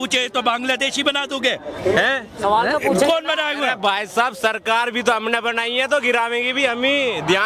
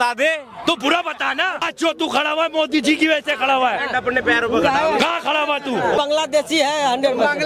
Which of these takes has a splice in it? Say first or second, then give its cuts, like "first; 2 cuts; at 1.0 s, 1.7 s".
second; 2 cuts; at 1.6 s, 6.0 s